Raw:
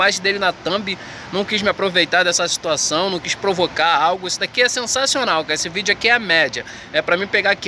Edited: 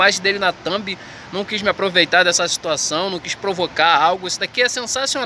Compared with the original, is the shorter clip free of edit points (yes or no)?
yes